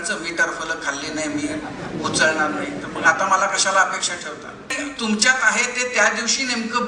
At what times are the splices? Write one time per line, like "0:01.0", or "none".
0:04.8